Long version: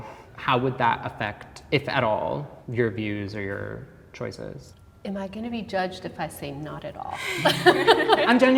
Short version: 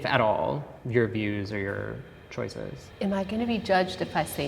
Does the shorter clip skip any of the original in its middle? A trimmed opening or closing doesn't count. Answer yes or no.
yes